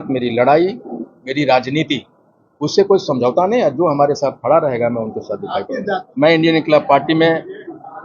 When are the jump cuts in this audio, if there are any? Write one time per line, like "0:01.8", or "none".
0:06.1